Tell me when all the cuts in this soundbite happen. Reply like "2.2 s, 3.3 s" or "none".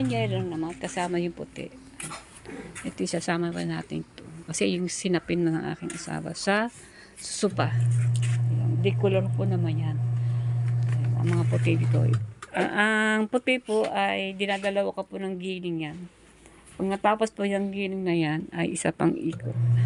none